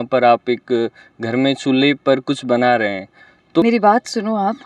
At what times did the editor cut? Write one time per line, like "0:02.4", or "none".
0:03.6